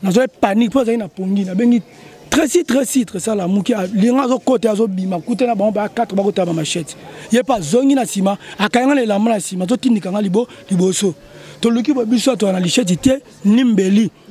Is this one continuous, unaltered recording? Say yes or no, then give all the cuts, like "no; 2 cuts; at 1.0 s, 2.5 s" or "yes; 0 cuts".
yes; 0 cuts